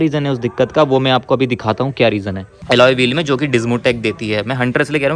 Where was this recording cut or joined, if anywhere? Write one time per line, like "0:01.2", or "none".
0:02.6